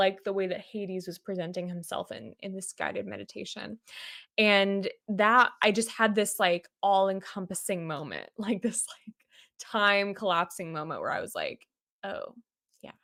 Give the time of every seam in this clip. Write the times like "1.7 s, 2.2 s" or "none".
none